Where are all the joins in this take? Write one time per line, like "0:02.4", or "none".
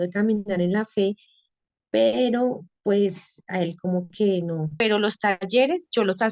0:04.7